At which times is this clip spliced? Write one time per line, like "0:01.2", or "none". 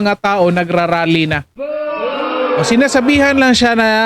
none